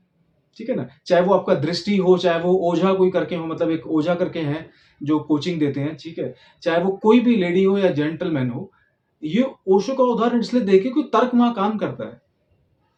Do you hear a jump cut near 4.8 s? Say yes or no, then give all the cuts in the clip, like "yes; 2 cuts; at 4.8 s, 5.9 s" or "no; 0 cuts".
no; 0 cuts